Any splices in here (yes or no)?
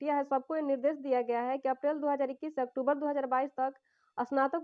no